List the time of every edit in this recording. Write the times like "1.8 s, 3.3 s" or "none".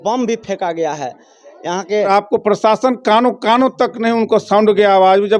2.1 s